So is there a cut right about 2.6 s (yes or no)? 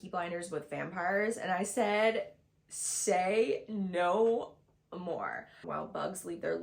no